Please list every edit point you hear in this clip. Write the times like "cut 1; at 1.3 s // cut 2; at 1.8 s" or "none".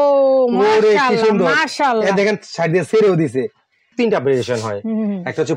cut 1; at 3.9 s

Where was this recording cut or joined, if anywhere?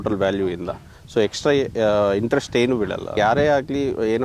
cut 1; at 3.1 s

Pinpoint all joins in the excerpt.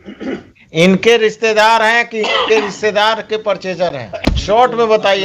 cut 1; at 4.1 s

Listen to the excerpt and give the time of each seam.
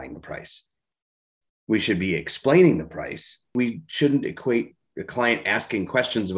cut 1; at 3.5 s

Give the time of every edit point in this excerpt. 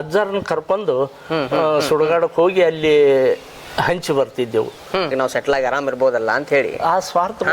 cut 1; at 5.1 s

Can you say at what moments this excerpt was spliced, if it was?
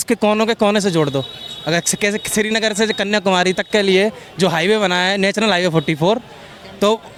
none

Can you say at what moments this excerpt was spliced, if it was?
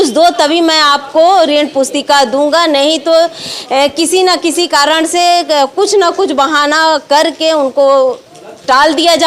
none

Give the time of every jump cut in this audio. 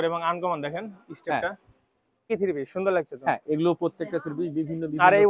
cut 1; at 2.3 s

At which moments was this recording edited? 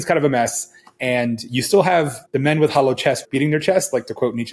cut 1; at 2.2 s // cut 2; at 3.2 s

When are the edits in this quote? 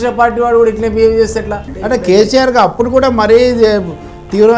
cut 1; at 1.8 s

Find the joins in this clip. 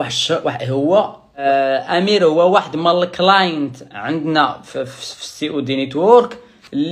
cut 1; at 1.4 s

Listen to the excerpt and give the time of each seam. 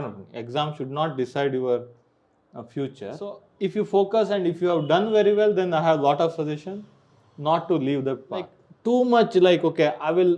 cut 1; at 3.5 s // cut 2; at 8.6 s

